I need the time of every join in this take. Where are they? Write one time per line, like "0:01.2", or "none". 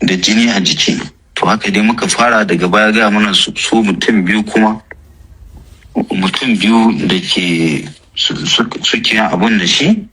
none